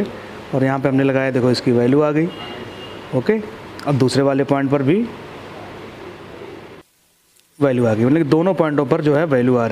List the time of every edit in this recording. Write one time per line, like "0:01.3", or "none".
none